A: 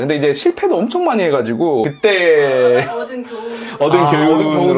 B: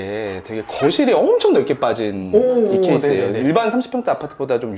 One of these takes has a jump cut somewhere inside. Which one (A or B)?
A